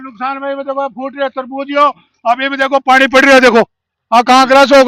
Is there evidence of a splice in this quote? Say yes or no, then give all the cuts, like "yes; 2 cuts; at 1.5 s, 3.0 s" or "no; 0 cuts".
no; 0 cuts